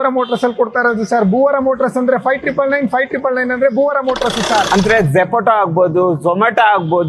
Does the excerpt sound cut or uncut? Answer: cut